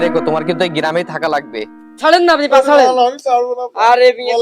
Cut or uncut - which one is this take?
cut